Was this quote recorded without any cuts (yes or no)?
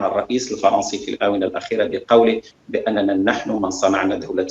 yes